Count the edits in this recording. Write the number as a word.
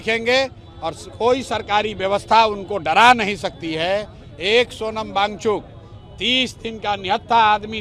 zero